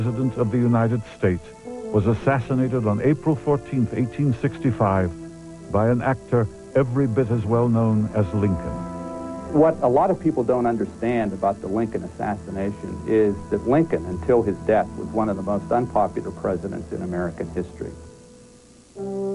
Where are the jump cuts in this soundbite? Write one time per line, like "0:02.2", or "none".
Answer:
0:05.4